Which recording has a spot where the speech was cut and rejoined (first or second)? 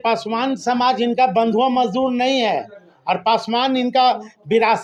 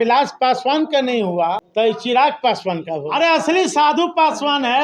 second